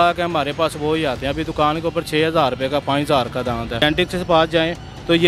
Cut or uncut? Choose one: cut